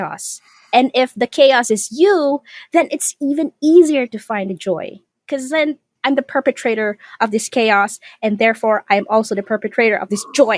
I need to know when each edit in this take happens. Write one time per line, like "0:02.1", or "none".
none